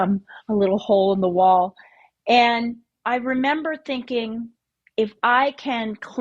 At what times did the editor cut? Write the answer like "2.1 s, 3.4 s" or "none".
2.9 s

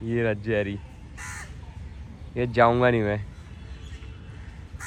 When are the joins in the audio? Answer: none

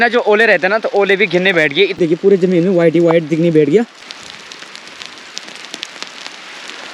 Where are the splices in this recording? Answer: 2.0 s, 4.0 s

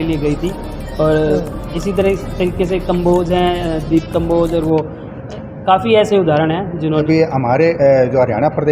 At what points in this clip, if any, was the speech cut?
7.0 s

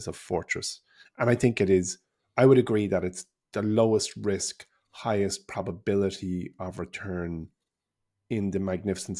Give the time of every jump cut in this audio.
none

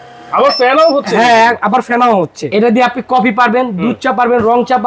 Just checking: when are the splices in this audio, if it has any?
2.5 s

